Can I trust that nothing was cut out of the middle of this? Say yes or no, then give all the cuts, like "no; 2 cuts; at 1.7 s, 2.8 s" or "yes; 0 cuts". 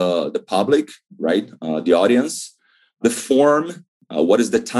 no; 1 cut; at 3.0 s